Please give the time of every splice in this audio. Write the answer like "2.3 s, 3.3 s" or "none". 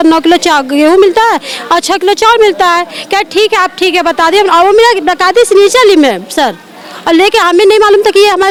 none